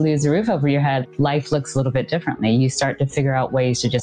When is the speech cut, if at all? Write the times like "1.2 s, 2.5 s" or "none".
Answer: none